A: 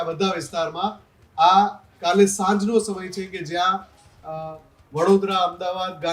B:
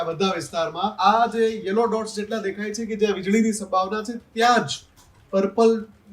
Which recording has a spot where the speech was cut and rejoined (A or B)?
B